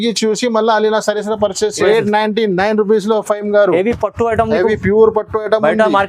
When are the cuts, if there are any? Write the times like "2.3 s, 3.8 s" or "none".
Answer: 1.8 s